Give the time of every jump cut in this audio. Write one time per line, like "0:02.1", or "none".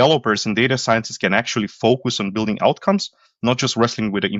none